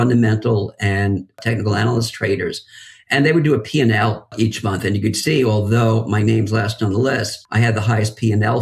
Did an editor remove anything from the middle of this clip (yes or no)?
yes